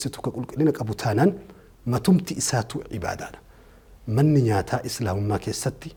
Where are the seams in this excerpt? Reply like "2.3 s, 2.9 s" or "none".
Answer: none